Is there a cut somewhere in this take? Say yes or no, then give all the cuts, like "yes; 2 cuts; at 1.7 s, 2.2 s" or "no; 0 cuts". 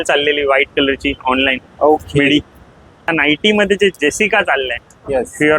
yes; 1 cut; at 3.1 s